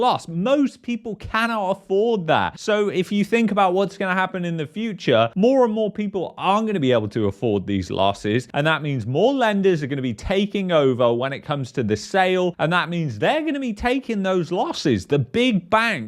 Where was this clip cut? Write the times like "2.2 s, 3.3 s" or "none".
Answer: none